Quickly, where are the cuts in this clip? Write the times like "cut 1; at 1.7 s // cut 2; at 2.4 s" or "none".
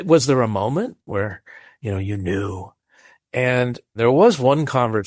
cut 1; at 1.1 s // cut 2; at 3.9 s